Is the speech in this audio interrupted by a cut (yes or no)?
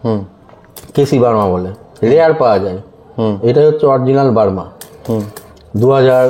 no